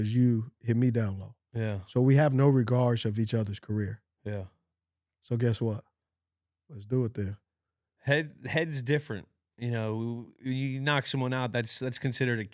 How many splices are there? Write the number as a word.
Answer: zero